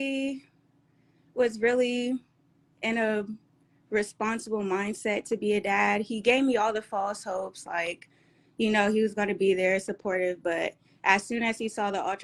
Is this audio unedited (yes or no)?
yes